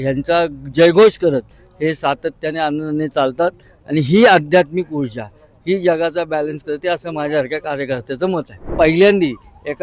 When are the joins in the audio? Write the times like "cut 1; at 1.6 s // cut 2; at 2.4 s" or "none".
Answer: cut 1; at 8.7 s